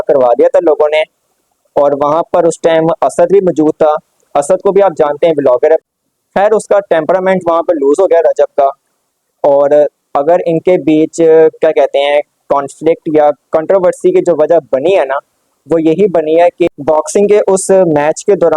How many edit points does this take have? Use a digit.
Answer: 2